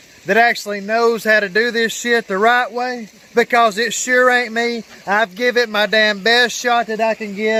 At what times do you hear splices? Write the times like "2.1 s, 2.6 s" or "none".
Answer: none